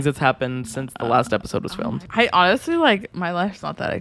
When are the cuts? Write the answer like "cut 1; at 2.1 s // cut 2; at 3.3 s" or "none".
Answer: cut 1; at 2.0 s

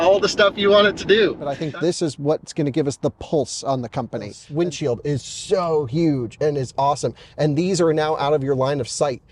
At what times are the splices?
cut 1; at 1.5 s // cut 2; at 4.4 s

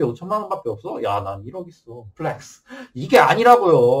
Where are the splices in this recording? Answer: none

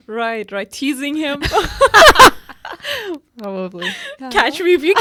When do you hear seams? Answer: none

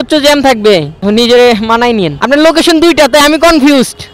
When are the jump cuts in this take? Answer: cut 1; at 1.0 s // cut 2; at 2.2 s

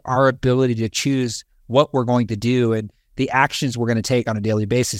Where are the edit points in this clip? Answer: none

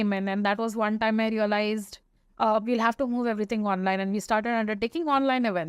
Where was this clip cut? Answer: none

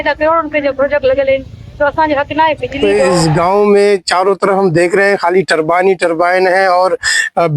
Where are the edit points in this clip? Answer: cut 1; at 2.8 s

